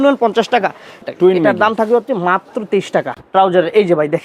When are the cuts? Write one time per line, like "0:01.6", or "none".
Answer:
0:01.0
0:03.2